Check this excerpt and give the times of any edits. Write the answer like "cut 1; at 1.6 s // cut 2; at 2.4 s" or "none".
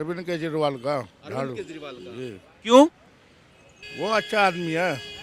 none